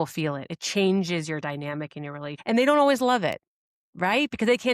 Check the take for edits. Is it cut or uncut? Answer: cut